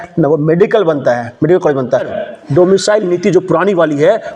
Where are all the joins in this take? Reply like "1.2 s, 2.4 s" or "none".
2.1 s